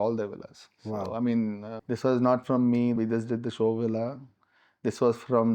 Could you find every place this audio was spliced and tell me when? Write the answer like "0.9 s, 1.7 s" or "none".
1.7 s, 3.0 s